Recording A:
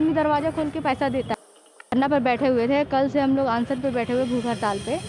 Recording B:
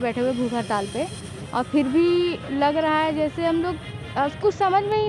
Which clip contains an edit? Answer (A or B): A